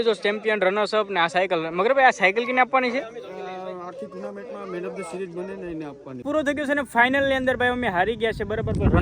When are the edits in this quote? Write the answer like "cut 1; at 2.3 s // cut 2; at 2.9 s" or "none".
cut 1; at 6.2 s